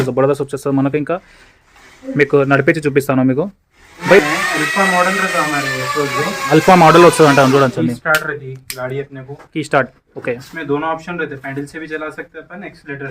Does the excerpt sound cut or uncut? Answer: cut